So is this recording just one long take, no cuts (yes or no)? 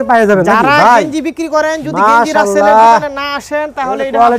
yes